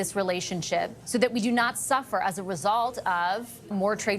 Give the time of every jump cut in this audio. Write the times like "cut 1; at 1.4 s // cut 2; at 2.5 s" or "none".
cut 1; at 1.0 s